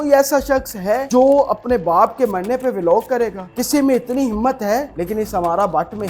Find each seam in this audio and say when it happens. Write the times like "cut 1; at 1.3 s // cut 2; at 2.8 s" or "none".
cut 1; at 1.0 s // cut 2; at 3.4 s // cut 3; at 4.9 s